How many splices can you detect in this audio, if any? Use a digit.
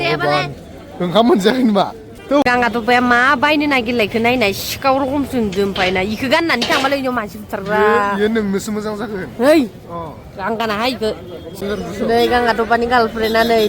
2